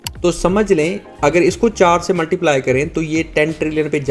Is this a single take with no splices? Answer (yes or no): yes